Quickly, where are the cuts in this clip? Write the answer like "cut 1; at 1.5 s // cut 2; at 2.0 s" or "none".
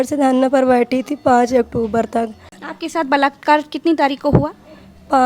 cut 1; at 2.6 s